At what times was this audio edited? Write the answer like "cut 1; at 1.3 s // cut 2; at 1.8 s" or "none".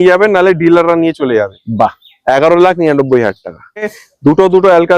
cut 1; at 4.0 s

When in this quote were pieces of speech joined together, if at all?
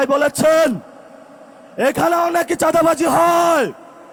none

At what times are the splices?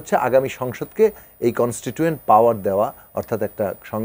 none

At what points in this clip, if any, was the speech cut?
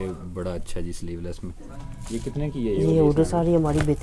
cut 1; at 1.5 s

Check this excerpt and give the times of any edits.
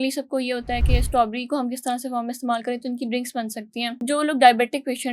cut 1; at 4.0 s

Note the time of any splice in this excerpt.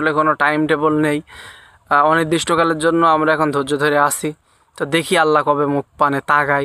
none

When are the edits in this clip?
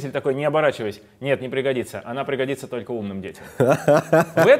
none

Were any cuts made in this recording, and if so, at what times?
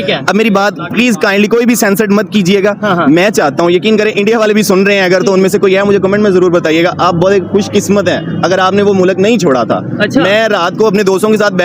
cut 1; at 3.5 s

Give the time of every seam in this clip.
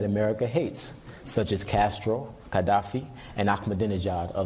cut 1; at 2.6 s

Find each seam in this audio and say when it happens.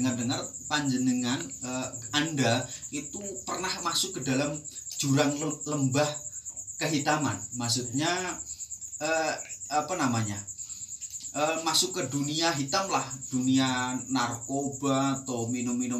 none

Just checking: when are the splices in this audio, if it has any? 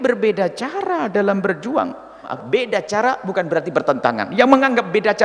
cut 1; at 2.3 s

